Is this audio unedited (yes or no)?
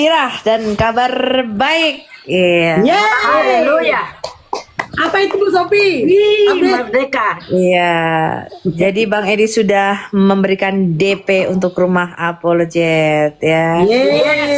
yes